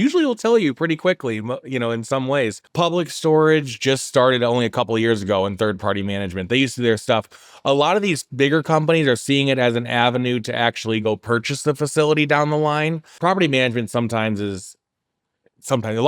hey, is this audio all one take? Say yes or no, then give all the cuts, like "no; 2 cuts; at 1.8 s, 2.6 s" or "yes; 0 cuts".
no; 2 cuts; at 2.6 s, 13.1 s